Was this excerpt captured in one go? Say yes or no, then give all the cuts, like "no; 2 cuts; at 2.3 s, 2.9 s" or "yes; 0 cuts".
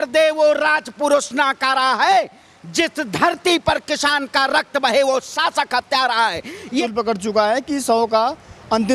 no; 1 cut; at 6.8 s